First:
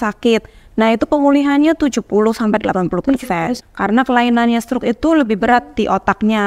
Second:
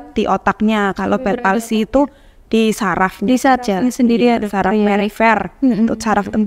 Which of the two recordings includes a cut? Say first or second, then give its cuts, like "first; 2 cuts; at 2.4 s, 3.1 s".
first; 1 cut; at 3.6 s